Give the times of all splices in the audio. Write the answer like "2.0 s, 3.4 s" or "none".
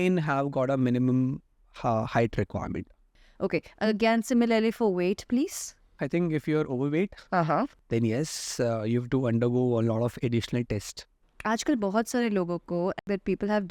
3.0 s, 6.0 s, 11.2 s, 13.0 s